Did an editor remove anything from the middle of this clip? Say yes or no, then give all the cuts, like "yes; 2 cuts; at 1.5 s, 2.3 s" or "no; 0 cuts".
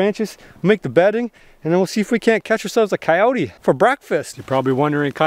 yes; 2 cuts; at 3.5 s, 4.4 s